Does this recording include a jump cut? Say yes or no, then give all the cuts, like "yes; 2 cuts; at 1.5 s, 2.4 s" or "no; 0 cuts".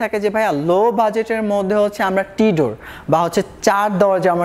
no; 0 cuts